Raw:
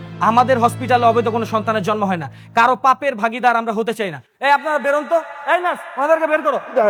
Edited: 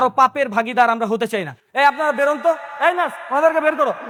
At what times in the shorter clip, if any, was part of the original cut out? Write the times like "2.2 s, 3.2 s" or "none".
none